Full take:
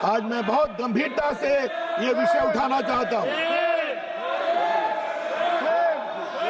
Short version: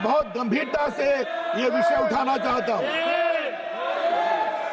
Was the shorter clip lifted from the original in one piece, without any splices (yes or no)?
yes